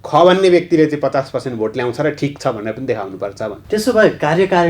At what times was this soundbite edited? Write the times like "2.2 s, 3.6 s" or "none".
3.6 s